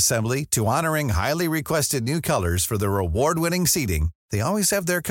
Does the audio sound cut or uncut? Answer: uncut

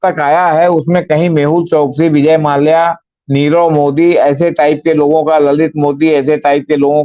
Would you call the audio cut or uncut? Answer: uncut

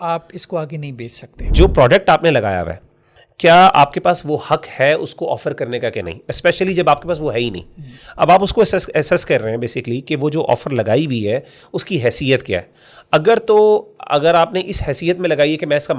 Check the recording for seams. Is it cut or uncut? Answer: cut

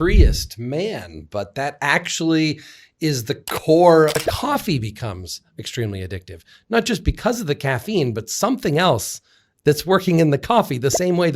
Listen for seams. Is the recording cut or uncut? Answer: cut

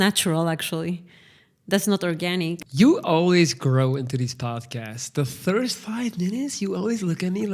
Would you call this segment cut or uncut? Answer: cut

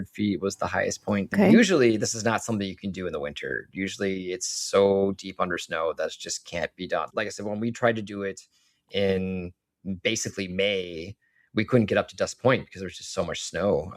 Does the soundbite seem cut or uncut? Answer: cut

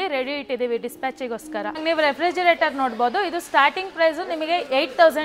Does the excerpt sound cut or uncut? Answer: cut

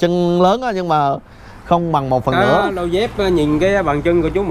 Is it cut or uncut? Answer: uncut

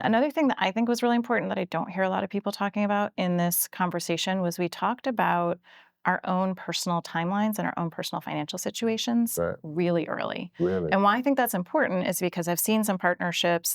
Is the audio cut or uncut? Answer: uncut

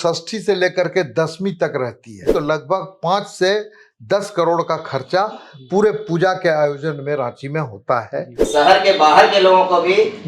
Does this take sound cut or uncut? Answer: cut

